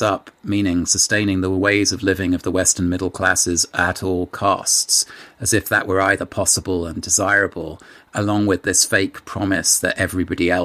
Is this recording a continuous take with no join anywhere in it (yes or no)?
yes